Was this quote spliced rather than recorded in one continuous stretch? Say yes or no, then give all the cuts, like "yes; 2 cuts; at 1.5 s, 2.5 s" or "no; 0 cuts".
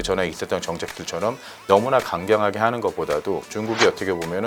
no; 0 cuts